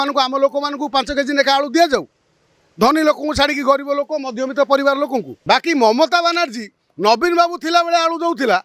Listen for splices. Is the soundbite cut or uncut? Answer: cut